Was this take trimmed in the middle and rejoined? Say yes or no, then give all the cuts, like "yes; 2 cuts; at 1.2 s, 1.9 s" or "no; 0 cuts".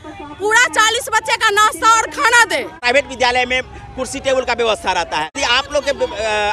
yes; 2 cuts; at 2.8 s, 5.3 s